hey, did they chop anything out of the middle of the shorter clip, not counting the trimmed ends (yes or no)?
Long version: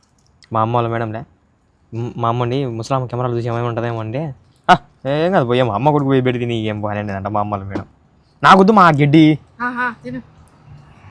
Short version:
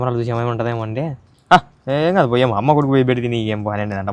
no